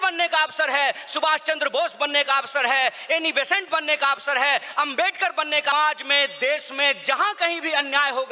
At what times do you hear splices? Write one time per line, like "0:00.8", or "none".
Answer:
0:05.7

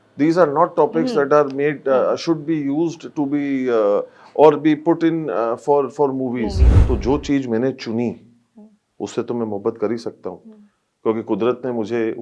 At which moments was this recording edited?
0:06.7

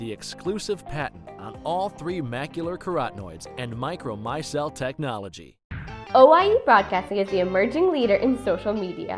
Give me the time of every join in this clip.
0:05.7

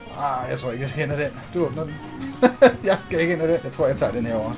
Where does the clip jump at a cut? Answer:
0:03.7

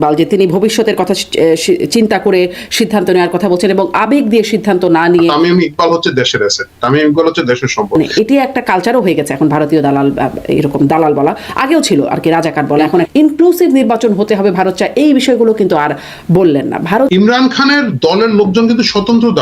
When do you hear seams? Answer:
0:05.3
0:08.0
0:13.1
0:17.1

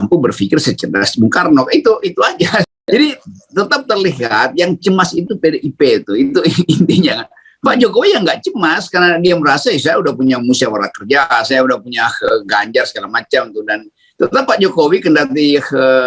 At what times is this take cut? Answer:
0:02.8

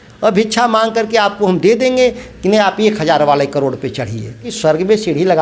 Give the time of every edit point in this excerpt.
0:04.5

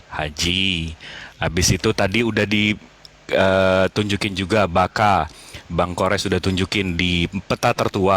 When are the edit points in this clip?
none

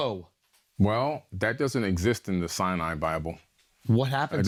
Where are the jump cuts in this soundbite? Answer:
none

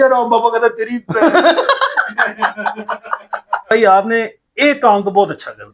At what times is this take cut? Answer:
0:03.7

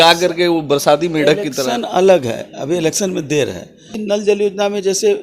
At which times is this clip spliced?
0:03.9

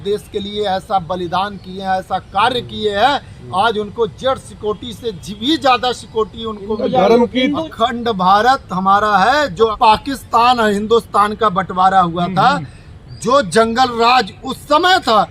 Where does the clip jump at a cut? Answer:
0:07.6
0:09.7

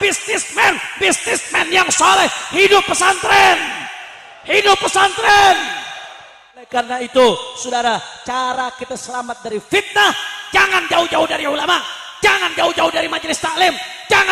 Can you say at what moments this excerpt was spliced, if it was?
0:06.7

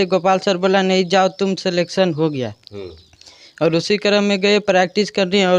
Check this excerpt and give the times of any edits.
none

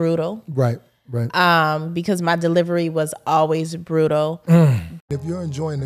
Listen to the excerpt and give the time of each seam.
0:04.9

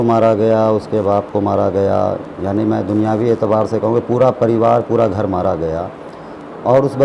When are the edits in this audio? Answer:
none

